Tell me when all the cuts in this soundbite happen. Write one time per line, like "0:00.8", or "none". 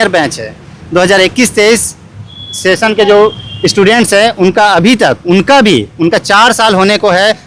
none